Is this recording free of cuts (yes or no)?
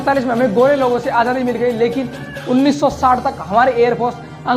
yes